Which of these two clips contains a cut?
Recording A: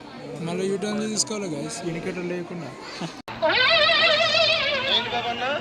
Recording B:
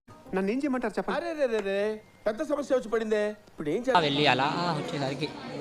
B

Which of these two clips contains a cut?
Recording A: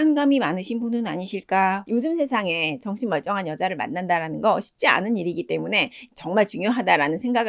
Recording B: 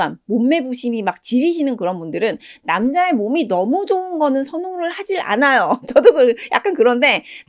A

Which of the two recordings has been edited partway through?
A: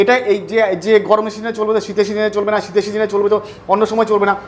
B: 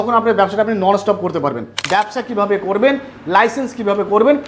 B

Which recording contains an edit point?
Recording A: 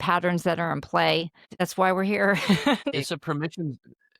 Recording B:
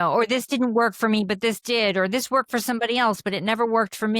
A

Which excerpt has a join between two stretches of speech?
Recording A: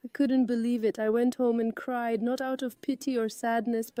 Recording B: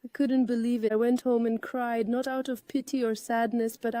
B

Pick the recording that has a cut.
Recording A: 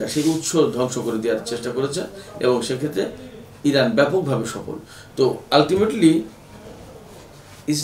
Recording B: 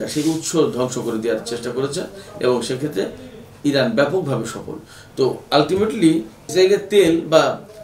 B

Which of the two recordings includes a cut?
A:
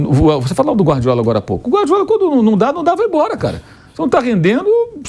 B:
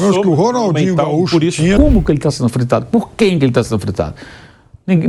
B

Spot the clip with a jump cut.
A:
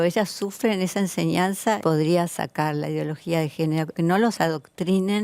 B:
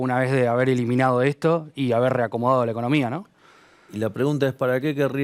A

